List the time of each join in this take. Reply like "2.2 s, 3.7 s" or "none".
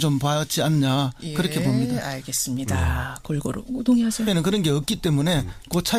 none

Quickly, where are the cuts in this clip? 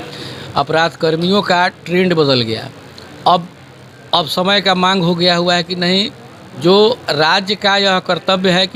none

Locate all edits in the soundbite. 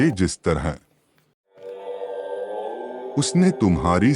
1.3 s, 3.1 s

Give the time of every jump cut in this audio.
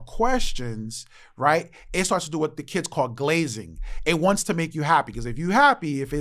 none

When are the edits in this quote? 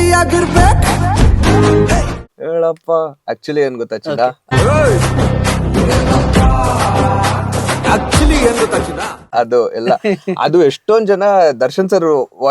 2.0 s, 4.4 s, 9.2 s

